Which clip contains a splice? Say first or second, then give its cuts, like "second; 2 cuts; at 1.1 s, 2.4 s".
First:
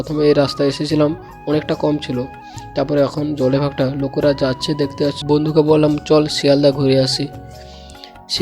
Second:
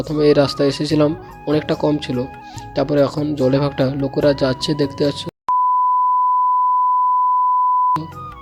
first; 1 cut; at 5.2 s